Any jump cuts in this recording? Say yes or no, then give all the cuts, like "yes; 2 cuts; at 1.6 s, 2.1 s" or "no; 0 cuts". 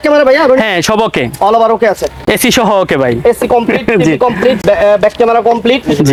no; 0 cuts